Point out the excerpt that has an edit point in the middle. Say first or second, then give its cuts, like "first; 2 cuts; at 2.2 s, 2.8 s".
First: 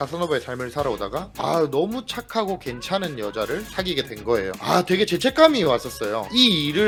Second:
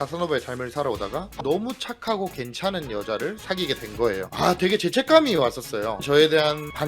second; 2 cuts; at 1.4 s, 6.0 s